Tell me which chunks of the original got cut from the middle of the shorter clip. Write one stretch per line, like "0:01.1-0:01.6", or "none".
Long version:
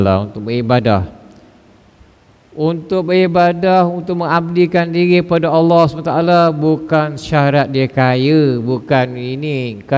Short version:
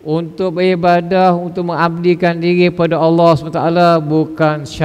none